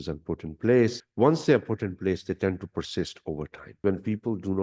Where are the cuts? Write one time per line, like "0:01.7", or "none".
0:01.0
0:03.8